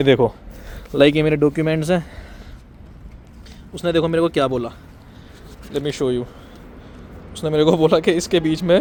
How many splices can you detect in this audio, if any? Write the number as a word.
zero